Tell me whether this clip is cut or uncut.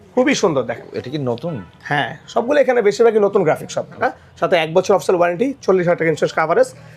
cut